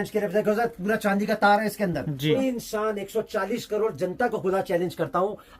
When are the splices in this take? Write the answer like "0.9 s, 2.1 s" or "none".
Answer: 2.4 s